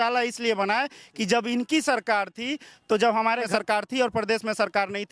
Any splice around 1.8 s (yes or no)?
no